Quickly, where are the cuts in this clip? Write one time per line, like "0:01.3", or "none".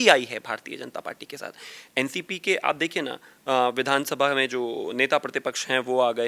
none